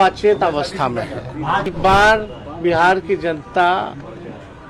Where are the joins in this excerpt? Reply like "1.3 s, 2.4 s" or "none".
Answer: 1.7 s